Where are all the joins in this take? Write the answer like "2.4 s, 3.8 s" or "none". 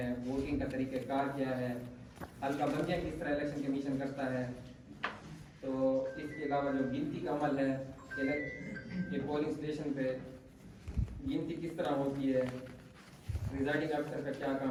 none